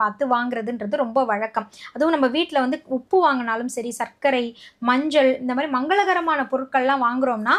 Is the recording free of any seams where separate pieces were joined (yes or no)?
yes